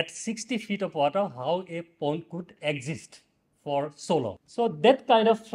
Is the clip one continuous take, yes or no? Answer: no